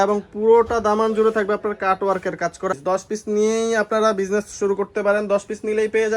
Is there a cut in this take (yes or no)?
yes